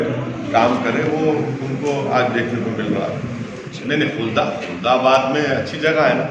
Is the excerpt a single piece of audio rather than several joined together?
no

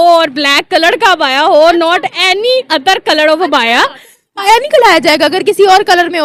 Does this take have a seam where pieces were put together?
no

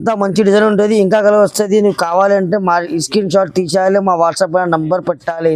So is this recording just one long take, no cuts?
yes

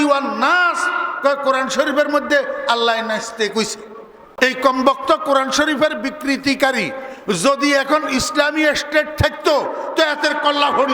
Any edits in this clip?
yes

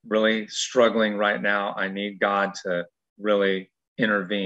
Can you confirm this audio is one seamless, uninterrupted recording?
yes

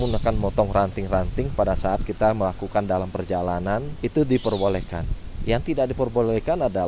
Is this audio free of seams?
yes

